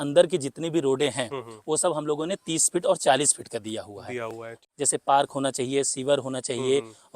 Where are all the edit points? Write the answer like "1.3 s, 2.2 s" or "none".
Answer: 4.6 s